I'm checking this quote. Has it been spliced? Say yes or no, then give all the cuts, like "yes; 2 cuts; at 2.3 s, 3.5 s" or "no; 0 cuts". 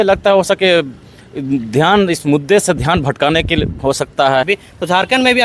yes; 1 cut; at 4.5 s